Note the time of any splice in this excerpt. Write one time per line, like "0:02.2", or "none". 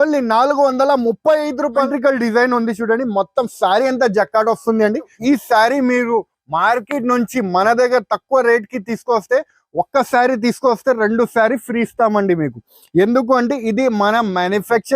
0:01.9
0:05.1